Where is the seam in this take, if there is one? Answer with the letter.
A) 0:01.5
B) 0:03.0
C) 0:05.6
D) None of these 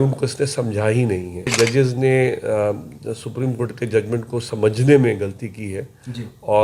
A